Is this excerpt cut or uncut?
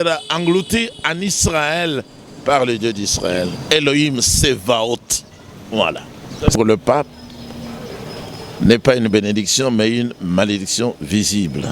cut